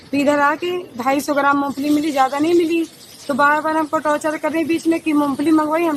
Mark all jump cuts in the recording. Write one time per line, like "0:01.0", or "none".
none